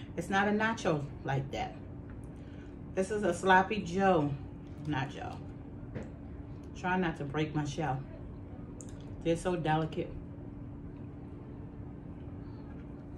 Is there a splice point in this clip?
no; 0 cuts

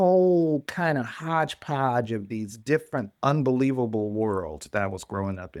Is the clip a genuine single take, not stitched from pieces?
yes; 0 cuts

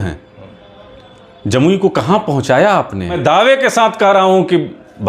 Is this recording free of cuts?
no; 1 cut; at 3.2 s

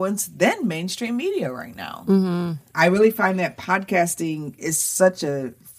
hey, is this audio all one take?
no; 1 cut; at 2.6 s

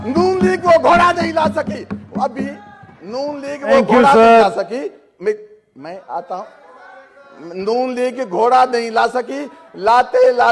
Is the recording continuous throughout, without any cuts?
yes; 0 cuts

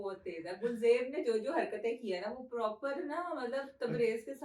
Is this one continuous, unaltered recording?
yes; 0 cuts

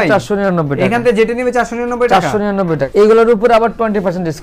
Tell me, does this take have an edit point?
yes; 1 cut; at 2.9 s

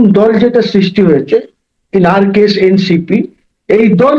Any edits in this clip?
no; 0 cuts

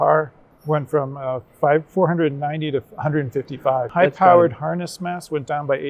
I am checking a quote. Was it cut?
yes; 1 cut; at 3.9 s

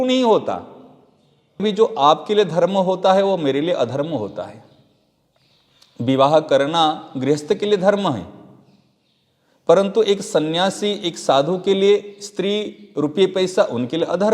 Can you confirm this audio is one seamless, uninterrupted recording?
no; 1 cut; at 1.6 s

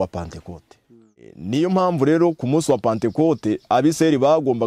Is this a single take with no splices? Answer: no; 1 cut; at 1.3 s

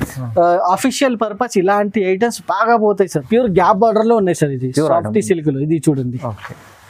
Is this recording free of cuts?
no; 1 cut; at 3.2 s

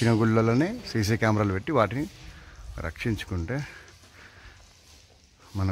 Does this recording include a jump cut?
no; 0 cuts

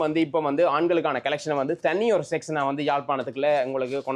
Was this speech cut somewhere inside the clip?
no; 0 cuts

